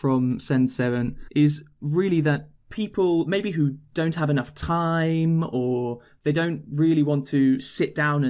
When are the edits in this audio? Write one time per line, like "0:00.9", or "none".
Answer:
0:01.2

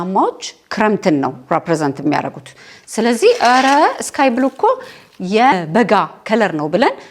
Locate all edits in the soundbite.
0:05.6

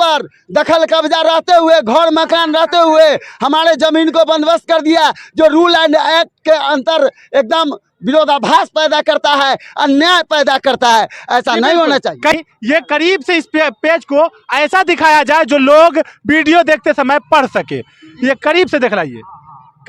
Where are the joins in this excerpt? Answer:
0:12.4

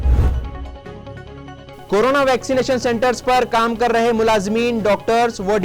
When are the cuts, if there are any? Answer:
none

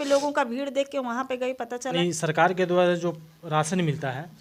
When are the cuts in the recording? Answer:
0:01.9

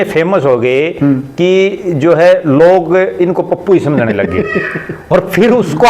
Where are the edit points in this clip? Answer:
none

